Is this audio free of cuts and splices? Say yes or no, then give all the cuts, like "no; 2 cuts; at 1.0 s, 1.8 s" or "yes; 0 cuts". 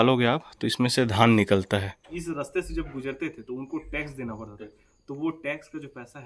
no; 1 cut; at 2.1 s